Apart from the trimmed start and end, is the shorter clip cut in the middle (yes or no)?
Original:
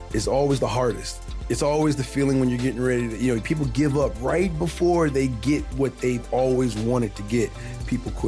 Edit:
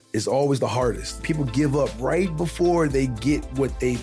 yes